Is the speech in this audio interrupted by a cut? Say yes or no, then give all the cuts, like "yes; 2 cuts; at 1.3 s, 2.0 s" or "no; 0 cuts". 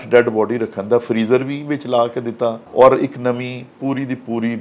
yes; 1 cut; at 2.6 s